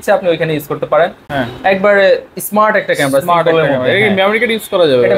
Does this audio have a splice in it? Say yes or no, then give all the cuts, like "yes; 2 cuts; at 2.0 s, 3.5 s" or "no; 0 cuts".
no; 0 cuts